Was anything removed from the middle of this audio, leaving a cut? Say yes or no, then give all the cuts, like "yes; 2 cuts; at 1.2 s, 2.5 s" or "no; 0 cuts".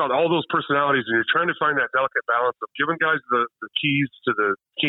no; 0 cuts